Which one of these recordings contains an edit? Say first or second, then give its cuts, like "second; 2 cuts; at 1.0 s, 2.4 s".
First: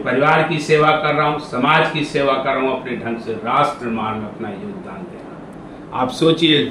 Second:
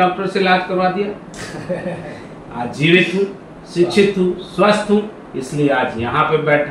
first; 1 cut; at 5.5 s